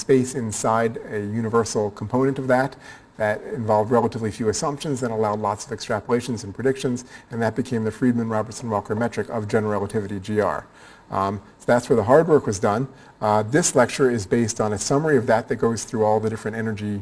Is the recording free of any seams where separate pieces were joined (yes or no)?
yes